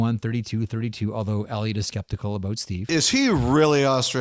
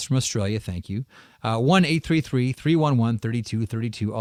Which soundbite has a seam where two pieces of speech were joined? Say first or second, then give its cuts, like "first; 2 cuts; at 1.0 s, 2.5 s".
first; 1 cut; at 2.9 s